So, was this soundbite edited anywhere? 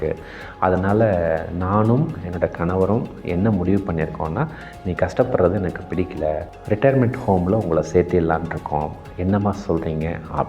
yes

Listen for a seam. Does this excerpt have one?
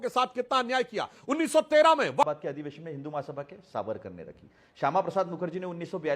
yes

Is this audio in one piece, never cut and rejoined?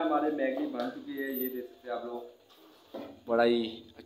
yes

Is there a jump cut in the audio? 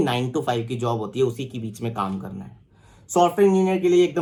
no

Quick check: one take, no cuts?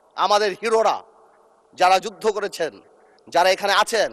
yes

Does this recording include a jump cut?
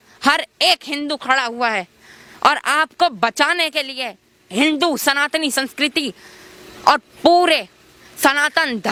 no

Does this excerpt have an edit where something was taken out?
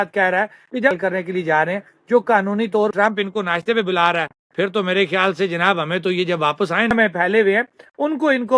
yes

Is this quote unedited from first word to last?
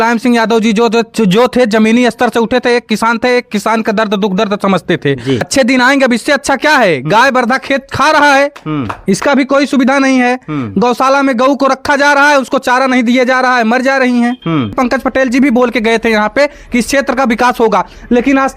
no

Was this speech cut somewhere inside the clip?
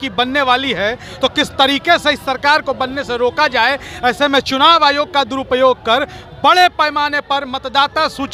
no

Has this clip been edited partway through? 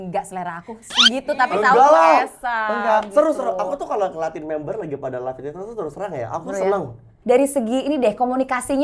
yes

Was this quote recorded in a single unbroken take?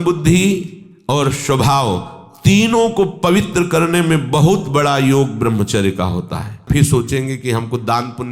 no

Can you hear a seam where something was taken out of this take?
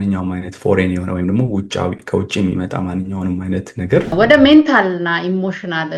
yes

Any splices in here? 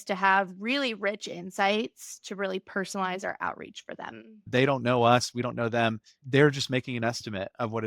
yes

